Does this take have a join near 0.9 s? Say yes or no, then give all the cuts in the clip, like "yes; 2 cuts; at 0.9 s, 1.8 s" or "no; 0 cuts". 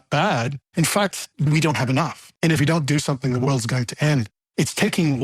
yes; 3 cuts; at 0.9 s, 2.6 s, 4.4 s